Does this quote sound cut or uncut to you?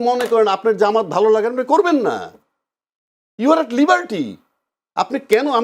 uncut